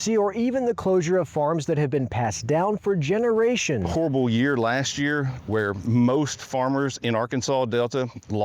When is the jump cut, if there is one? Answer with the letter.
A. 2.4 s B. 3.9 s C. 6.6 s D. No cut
B